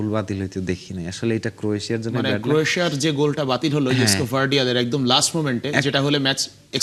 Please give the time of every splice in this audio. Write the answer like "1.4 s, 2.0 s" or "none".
none